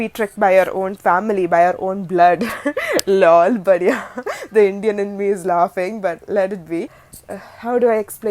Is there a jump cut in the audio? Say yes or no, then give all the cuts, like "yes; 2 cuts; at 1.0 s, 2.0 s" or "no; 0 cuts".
yes; 1 cut; at 7.0 s